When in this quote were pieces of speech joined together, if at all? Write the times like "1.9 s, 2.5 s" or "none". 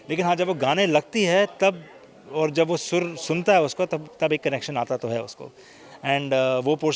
none